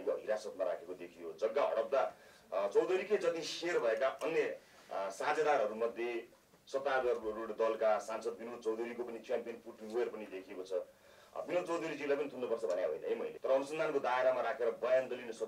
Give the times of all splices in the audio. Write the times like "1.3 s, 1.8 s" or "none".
13.3 s